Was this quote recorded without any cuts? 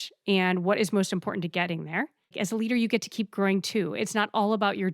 no; 1 cut; at 2.2 s

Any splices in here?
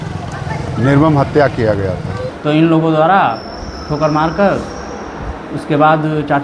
yes; 1 cut; at 2.3 s

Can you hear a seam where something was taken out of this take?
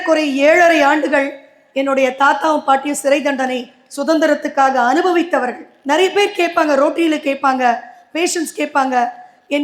yes; 1 cut; at 5.7 s

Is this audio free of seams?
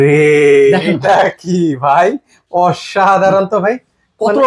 yes; 0 cuts

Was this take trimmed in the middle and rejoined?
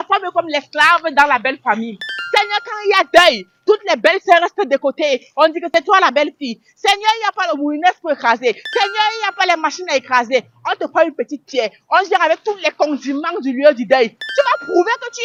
no; 0 cuts

